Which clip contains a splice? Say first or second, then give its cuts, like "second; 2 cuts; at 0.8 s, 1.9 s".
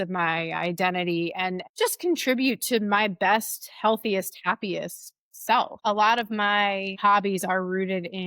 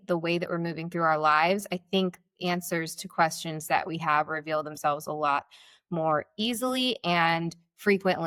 first; 2 cuts; at 5.7 s, 7.0 s